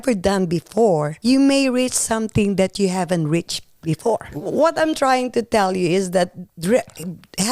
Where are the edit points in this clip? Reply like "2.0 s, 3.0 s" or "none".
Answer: 1.1 s, 4.2 s

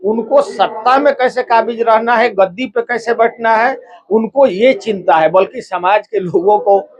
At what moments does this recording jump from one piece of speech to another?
none

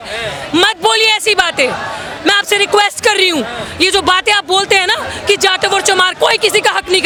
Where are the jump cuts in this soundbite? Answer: none

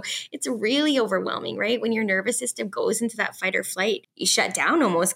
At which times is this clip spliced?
4.1 s

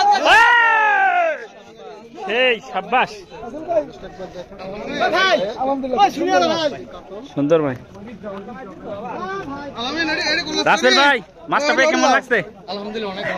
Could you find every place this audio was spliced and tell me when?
none

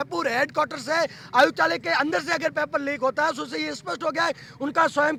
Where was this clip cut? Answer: none

